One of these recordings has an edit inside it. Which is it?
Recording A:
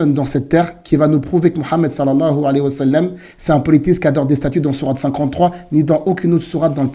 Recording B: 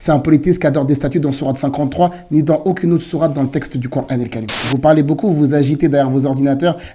B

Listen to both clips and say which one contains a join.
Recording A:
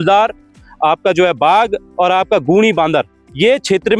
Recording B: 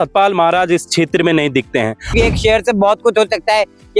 B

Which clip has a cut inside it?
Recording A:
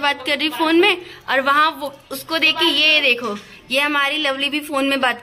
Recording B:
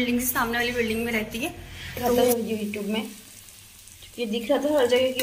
B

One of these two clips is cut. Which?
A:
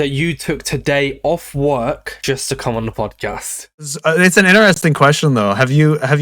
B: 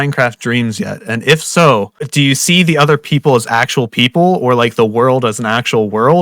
A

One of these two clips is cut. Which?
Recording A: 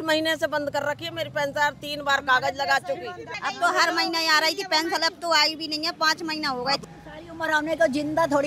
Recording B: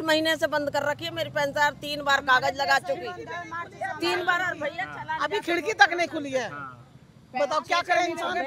A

